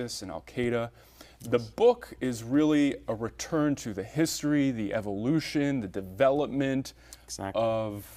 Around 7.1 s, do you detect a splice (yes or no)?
no